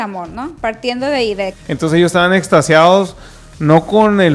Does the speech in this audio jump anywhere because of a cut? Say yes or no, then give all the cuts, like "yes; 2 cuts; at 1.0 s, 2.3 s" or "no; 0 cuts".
yes; 1 cut; at 1.6 s